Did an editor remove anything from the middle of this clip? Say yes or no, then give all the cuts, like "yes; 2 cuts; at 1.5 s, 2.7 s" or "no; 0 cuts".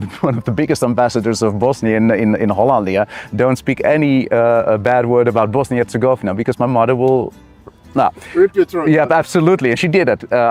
no; 0 cuts